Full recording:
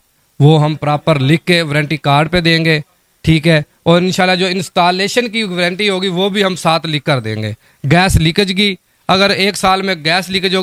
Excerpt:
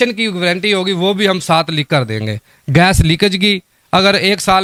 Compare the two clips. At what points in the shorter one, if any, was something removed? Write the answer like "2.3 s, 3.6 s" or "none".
none